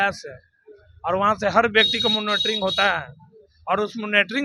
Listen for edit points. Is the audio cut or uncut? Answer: uncut